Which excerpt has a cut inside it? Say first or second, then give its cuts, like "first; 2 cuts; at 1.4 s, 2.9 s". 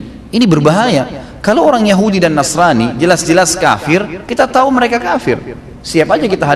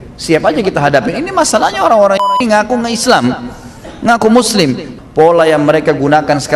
second; 1 cut; at 4.9 s